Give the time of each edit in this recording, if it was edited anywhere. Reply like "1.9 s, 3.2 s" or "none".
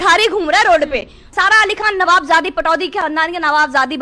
1.3 s